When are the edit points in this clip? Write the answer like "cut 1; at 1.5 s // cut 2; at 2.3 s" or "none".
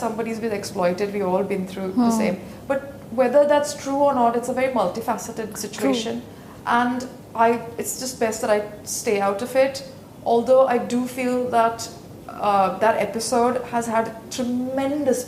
none